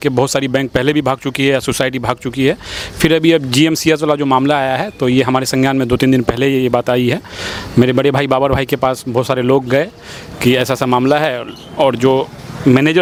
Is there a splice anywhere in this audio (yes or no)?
no